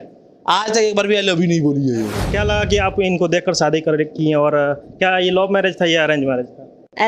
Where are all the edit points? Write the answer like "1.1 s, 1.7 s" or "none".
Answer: 2.2 s

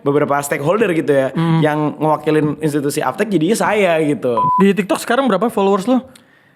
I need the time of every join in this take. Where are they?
4.5 s

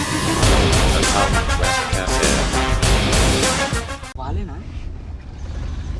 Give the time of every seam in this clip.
4.1 s

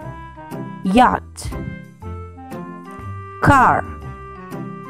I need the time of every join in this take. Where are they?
1.9 s, 3.4 s, 3.9 s

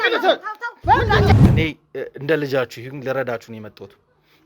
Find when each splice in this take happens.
1.5 s

